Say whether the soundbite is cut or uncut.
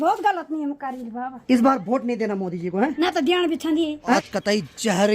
cut